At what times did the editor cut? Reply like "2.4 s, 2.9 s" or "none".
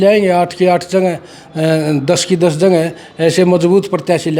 none